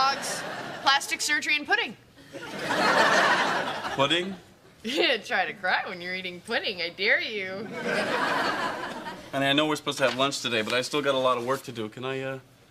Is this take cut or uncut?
cut